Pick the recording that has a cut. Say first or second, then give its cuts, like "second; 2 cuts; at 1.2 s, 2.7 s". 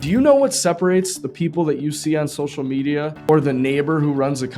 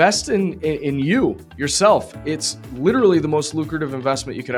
first; 1 cut; at 3.3 s